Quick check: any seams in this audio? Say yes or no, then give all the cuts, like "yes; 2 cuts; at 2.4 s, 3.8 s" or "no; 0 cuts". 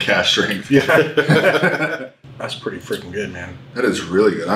yes; 1 cut; at 2.1 s